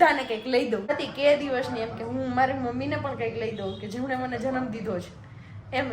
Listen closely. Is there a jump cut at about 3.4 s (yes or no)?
no